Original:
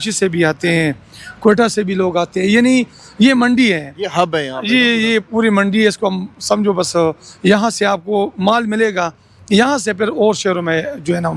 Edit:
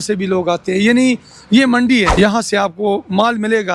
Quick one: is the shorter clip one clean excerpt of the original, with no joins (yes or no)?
no